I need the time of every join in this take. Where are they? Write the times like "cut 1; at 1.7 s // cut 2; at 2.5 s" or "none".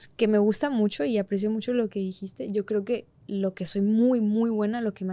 none